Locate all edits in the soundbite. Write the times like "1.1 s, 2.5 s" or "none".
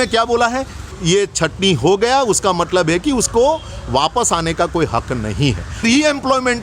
1.0 s, 5.8 s